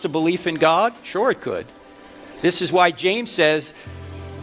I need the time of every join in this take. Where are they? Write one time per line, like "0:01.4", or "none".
none